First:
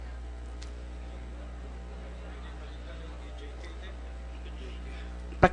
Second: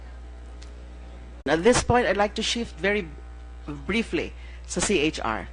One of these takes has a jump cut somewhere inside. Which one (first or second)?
first